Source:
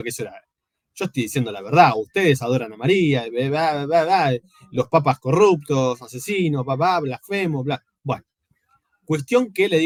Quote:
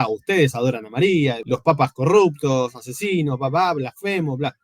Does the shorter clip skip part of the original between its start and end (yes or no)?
yes